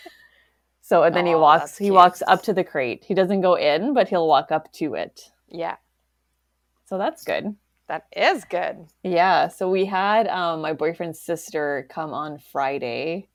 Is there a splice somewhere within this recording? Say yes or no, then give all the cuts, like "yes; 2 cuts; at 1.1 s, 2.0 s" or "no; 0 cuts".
no; 0 cuts